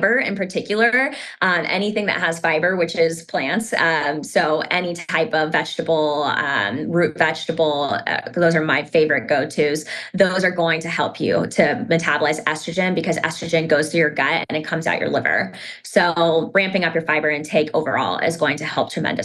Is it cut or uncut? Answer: uncut